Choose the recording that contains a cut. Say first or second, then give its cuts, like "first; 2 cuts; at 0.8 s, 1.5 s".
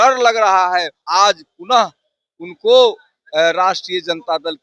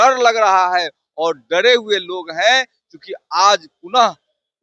first; 1 cut; at 1.0 s